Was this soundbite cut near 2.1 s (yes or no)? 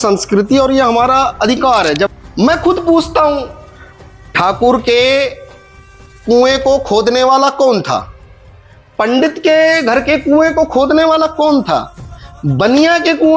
yes